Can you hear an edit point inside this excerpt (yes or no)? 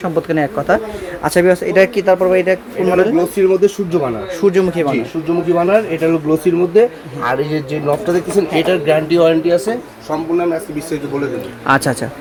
no